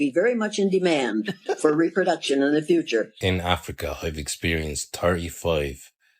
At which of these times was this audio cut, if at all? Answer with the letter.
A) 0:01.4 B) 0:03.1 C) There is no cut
B